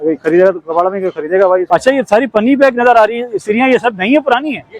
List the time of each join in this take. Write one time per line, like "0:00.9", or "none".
0:01.6